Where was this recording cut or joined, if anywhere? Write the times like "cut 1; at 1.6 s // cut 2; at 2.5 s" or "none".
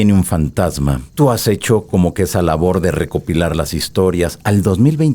cut 1; at 1.0 s